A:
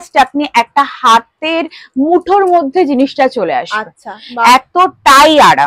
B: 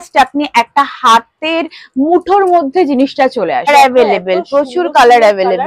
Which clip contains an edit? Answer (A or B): B